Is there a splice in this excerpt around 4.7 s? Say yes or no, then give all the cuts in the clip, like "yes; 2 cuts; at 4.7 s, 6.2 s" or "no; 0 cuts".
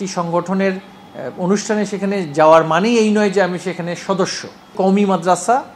yes; 1 cut; at 4.7 s